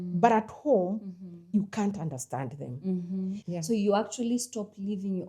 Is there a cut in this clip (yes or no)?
yes